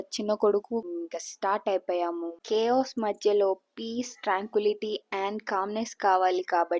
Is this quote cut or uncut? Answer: cut